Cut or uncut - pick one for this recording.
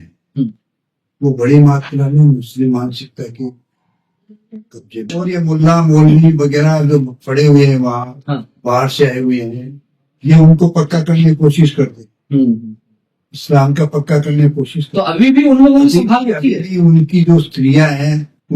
cut